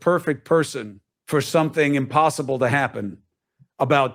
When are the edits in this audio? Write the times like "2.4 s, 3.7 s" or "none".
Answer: 2.1 s